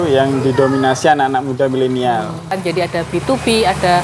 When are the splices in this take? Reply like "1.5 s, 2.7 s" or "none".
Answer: 2.6 s